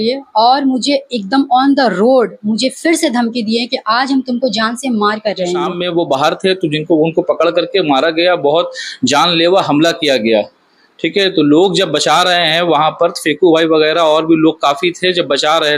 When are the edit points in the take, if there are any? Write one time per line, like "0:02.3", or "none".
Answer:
0:05.8